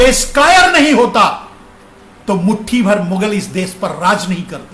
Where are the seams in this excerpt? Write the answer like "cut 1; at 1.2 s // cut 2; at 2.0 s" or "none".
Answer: none